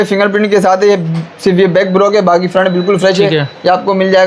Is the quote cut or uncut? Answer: uncut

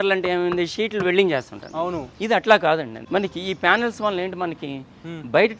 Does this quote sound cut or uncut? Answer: cut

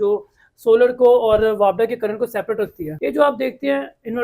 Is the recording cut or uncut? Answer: cut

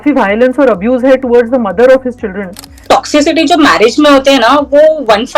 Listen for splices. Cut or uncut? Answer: cut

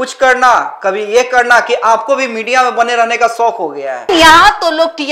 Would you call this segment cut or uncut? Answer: cut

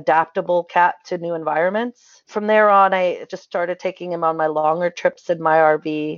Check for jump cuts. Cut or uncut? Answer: cut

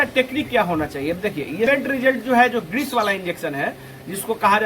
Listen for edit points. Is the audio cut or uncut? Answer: cut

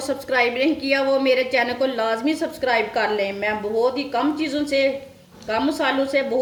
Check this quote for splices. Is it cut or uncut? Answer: uncut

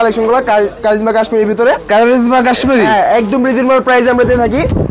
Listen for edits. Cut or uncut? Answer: uncut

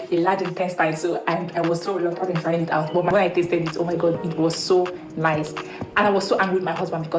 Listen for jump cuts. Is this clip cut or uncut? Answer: cut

